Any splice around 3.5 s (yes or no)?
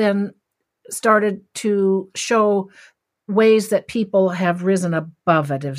no